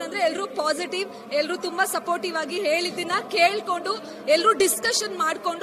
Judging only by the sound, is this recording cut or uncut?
uncut